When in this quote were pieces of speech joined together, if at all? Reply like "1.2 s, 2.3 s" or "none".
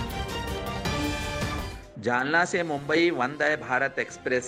none